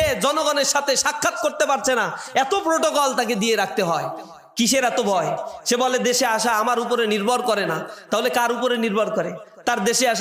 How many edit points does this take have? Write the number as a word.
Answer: zero